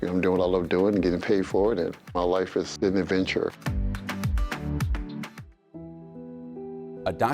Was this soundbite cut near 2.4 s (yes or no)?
no